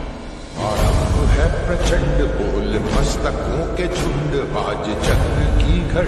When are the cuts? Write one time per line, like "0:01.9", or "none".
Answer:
none